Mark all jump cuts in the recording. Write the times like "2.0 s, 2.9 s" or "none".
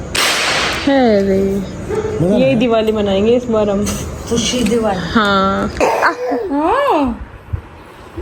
5.8 s